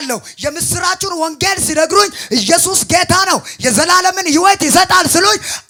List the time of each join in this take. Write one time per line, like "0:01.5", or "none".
none

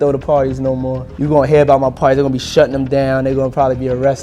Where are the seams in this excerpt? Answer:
0:01.1

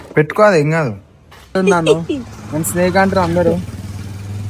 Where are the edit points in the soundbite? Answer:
0:01.5

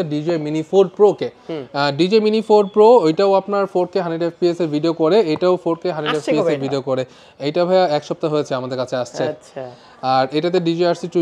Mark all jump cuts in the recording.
none

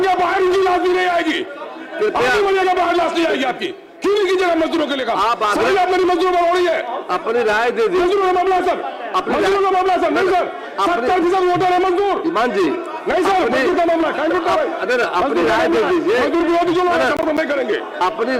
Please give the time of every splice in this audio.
none

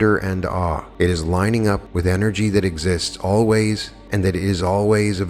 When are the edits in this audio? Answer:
0:00.9
0:01.9
0:03.9

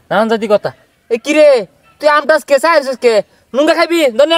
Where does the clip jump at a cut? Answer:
none

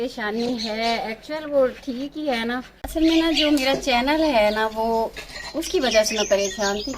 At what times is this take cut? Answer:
0:02.7

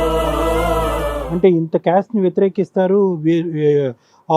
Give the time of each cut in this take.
0:01.2

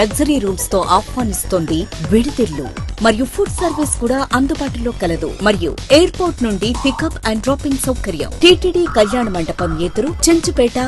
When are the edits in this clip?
none

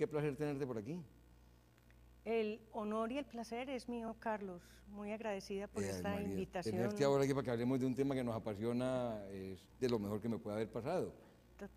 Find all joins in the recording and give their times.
0:06.9

